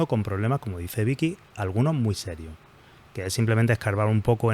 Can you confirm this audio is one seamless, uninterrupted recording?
yes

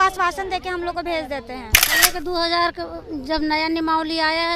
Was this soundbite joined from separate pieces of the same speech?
yes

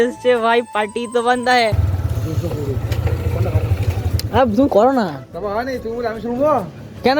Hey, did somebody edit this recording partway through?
yes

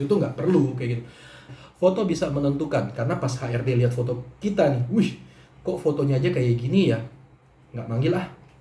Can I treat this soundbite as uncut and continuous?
no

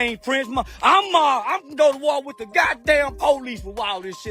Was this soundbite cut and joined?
no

